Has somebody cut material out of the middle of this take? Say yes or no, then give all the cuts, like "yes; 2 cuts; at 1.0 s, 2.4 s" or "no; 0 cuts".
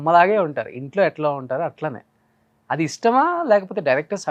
no; 0 cuts